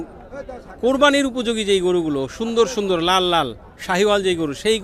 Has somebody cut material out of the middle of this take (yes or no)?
no